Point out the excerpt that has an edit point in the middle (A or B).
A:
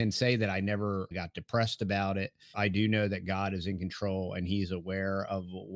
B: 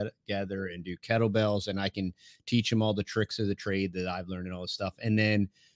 A